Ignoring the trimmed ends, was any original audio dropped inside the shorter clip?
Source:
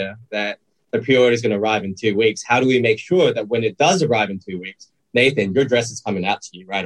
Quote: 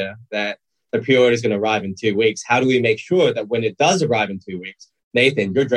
no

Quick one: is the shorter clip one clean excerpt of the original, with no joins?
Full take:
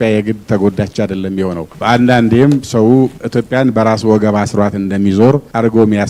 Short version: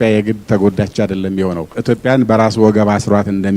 no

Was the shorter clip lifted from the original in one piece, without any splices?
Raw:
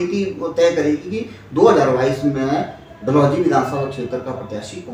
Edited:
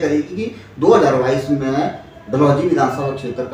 yes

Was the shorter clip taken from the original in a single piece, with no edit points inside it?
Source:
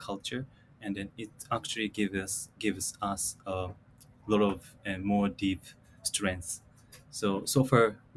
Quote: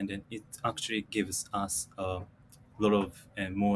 no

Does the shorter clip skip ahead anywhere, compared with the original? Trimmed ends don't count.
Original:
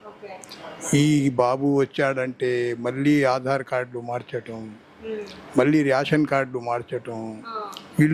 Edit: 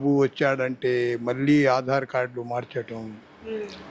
no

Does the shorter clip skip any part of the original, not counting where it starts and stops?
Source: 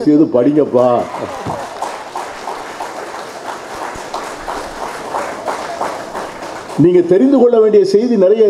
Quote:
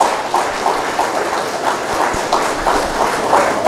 no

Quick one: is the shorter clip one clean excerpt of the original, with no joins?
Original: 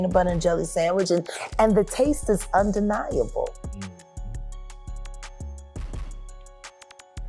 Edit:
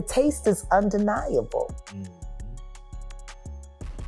no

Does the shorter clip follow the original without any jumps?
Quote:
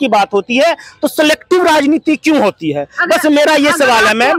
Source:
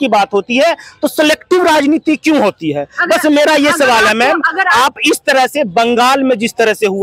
yes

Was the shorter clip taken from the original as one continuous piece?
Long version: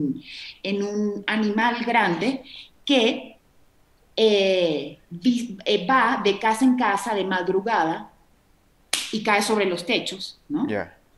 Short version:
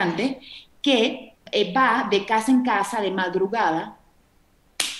no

